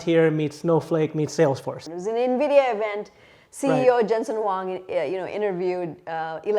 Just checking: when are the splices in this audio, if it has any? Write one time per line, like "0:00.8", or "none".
0:01.7

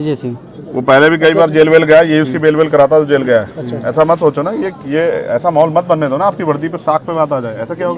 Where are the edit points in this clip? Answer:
none

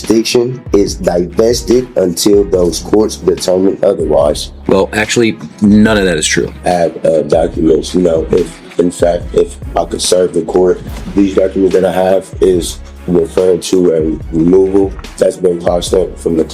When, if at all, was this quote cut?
0:04.5
0:06.5
0:10.9
0:15.0

